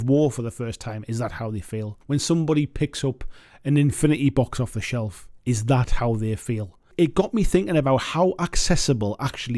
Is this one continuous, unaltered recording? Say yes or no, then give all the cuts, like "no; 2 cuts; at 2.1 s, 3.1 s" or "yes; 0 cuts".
no; 2 cuts; at 2.0 s, 6.9 s